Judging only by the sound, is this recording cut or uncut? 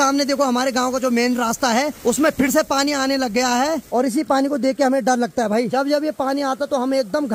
cut